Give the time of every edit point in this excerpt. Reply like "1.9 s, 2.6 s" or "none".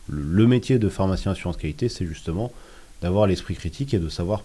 none